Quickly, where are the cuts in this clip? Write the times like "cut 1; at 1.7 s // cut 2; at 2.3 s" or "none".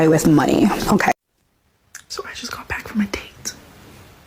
cut 1; at 1.1 s